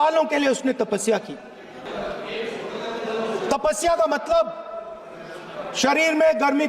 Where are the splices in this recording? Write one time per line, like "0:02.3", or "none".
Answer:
0:01.9